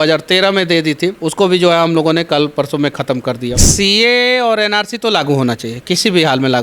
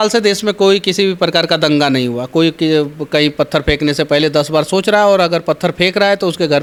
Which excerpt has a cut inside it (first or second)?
first